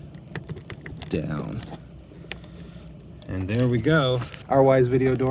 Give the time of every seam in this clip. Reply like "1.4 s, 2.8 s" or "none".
4.3 s